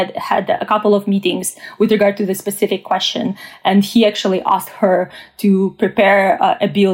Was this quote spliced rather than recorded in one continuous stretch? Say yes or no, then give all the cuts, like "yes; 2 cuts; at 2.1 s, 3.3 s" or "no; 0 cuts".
no; 0 cuts